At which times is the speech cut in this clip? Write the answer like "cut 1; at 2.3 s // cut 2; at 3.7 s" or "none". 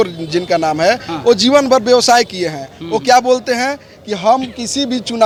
none